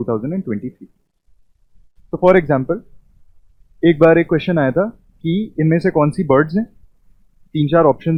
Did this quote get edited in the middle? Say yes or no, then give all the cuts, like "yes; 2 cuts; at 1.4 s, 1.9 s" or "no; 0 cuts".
no; 0 cuts